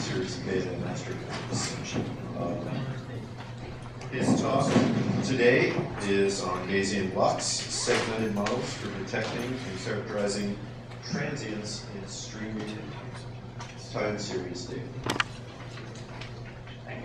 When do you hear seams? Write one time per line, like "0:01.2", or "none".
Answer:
none